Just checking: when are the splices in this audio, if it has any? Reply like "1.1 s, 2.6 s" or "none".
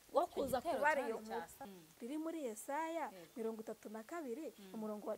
1.8 s